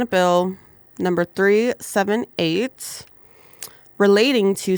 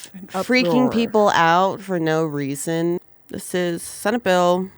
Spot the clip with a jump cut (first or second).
second